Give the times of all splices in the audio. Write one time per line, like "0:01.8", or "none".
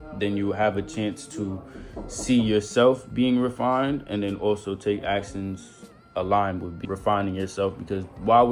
0:06.8